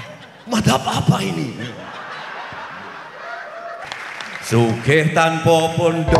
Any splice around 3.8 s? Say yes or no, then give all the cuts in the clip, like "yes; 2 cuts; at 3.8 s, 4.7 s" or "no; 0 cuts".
yes; 1 cut; at 3.8 s